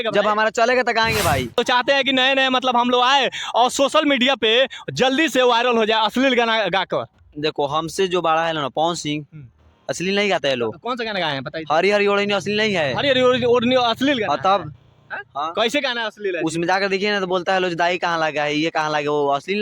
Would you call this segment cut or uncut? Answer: cut